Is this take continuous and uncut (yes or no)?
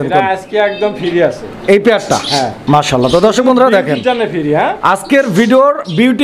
yes